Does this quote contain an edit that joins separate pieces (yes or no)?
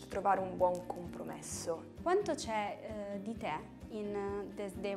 no